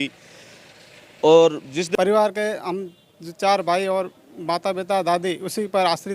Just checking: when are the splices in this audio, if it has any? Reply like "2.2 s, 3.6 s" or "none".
1.9 s